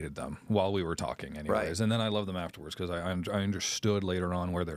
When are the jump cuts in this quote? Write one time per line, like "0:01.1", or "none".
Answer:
none